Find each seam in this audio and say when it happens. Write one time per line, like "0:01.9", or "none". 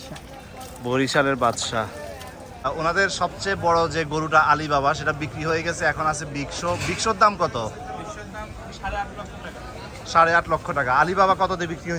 0:02.6

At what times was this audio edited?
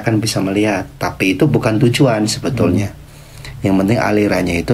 none

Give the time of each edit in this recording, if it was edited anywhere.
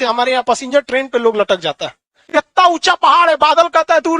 0:02.2

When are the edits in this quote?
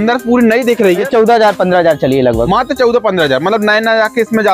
0:01.0

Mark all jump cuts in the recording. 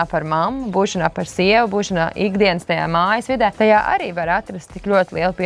0:03.5

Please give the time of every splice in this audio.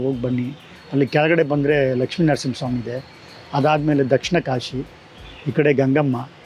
none

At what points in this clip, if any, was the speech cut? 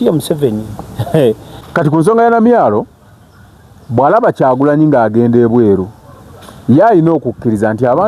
0:01.5

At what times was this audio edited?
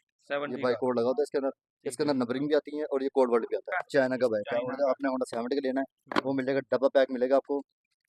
0:03.8

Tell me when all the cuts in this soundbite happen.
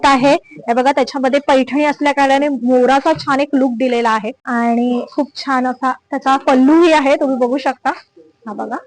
0:04.4

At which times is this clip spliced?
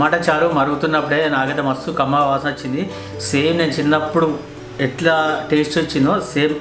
none

